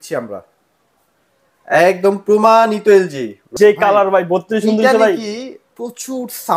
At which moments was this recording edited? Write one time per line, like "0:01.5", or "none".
0:03.5